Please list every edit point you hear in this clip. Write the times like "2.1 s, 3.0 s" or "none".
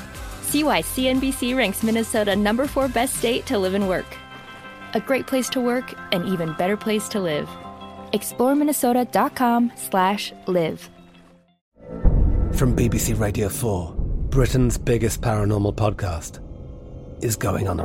11.6 s